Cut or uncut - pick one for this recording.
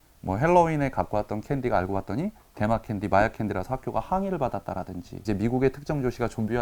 cut